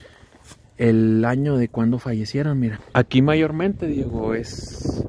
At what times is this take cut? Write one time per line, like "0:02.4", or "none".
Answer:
0:02.8